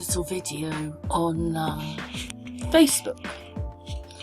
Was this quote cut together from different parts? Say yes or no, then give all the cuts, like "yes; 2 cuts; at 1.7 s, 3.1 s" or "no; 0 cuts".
yes; 1 cut; at 3.2 s